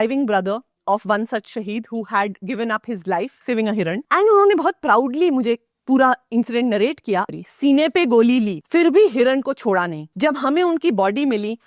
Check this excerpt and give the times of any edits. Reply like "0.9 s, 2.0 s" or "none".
3.4 s, 7.3 s, 8.6 s, 10.0 s

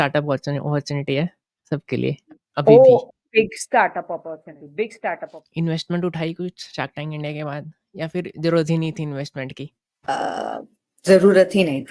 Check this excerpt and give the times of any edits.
5.4 s

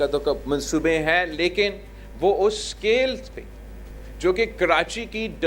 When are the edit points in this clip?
none

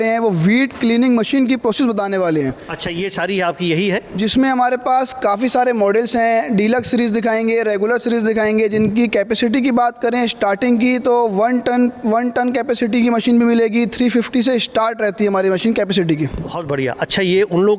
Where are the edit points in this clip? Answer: none

